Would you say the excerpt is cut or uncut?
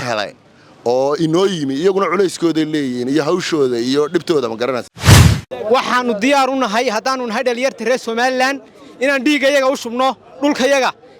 cut